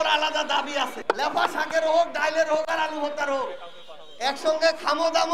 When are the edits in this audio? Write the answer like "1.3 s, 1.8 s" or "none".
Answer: 1.0 s

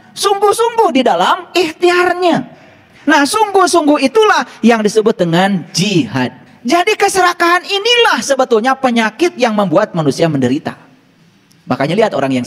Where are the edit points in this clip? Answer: 6.5 s

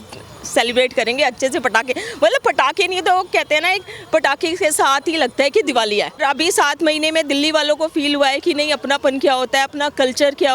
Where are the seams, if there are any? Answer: 6.2 s

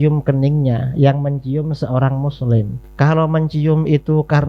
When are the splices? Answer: 2.8 s

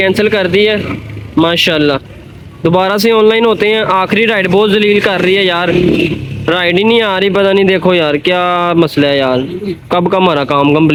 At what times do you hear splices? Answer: none

